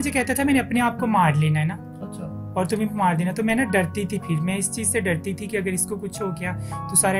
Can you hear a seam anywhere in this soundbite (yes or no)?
no